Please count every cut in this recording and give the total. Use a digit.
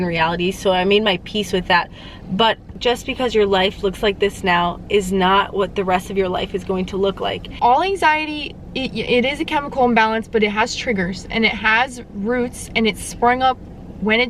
2